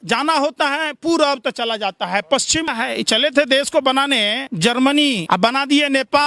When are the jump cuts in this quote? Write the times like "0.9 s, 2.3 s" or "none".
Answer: 2.7 s, 4.4 s, 5.2 s